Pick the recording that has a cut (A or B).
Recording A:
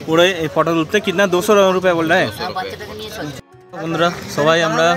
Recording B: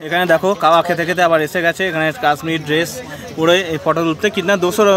A